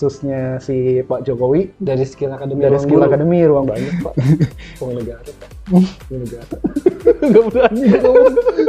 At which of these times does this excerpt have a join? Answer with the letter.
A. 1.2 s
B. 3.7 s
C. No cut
B